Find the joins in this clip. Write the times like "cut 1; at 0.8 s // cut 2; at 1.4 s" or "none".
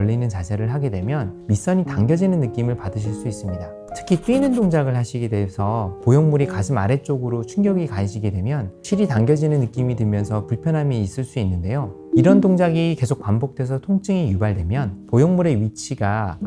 none